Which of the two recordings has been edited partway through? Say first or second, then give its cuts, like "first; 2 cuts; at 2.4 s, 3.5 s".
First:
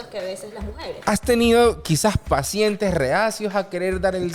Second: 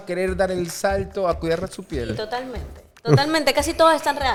first; 1 cut; at 1.0 s